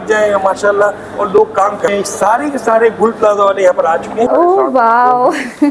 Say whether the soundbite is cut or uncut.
cut